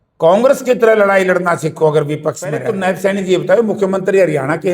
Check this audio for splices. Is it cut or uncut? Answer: cut